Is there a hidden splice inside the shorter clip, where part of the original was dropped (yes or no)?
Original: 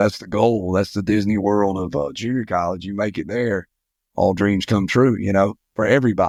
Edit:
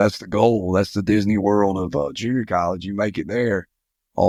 no